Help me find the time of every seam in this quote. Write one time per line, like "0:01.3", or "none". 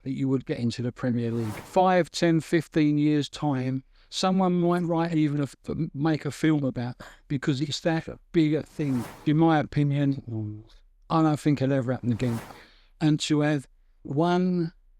0:01.6
0:09.1
0:12.5